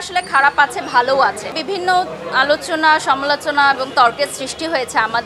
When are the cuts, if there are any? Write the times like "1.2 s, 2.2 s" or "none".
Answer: 1.6 s